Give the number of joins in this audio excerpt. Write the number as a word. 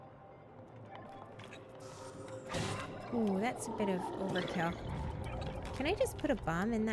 one